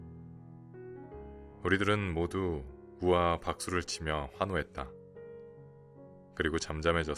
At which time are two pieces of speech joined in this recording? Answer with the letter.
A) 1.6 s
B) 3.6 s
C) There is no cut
A